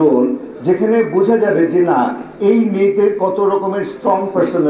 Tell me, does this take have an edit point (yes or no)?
no